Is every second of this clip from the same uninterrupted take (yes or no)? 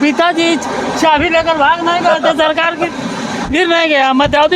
yes